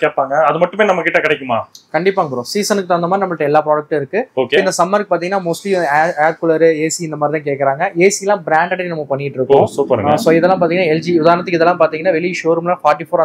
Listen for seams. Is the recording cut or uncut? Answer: uncut